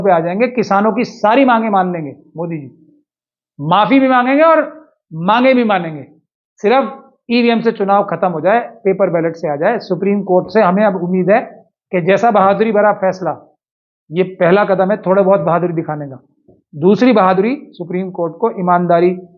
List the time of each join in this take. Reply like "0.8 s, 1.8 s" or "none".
none